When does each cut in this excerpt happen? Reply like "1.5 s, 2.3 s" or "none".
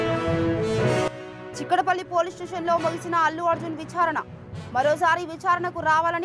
1.2 s